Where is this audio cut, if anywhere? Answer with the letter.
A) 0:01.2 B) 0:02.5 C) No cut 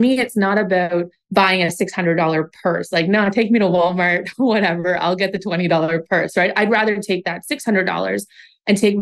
A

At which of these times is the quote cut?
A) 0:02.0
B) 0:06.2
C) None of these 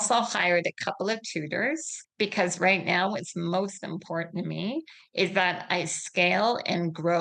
A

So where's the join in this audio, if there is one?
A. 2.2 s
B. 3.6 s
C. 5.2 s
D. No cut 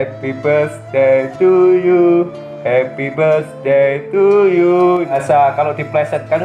C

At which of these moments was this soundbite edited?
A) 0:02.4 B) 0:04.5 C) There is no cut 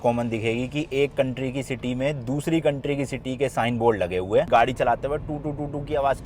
B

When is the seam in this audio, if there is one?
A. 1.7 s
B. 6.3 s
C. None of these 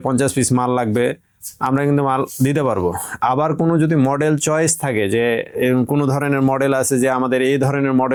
C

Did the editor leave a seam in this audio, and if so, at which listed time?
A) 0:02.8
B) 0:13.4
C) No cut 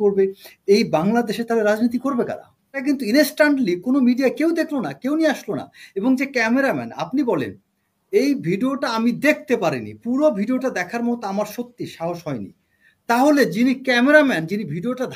A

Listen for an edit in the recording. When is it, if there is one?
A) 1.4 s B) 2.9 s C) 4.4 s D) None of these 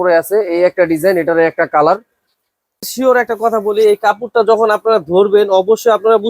B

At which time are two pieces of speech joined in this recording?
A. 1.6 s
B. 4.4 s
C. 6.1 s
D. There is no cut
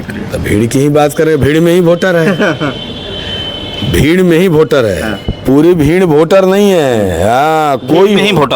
D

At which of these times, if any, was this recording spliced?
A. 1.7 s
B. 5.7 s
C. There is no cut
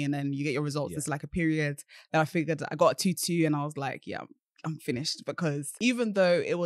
B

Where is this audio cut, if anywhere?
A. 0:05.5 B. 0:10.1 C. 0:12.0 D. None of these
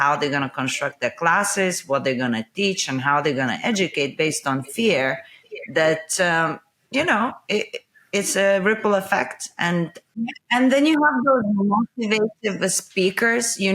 B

